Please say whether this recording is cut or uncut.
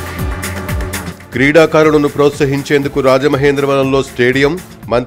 cut